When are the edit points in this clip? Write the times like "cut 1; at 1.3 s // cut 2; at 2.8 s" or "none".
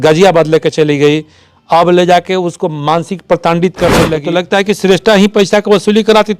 cut 1; at 4.2 s